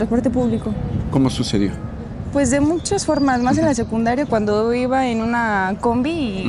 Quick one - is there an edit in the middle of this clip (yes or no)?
no